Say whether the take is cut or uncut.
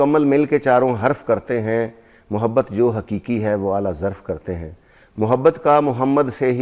uncut